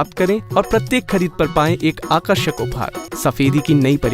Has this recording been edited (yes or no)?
yes